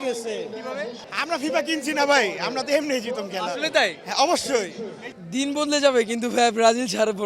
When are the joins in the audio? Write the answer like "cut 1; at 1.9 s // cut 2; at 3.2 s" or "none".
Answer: cut 1; at 1.0 s // cut 2; at 5.1 s